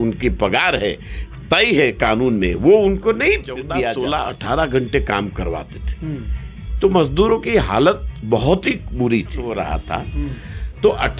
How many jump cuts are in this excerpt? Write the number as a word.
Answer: two